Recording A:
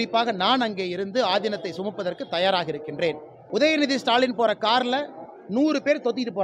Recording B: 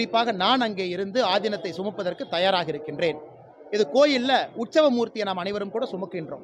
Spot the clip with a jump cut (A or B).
A